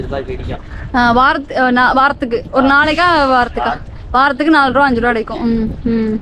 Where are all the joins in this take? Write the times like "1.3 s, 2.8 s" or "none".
none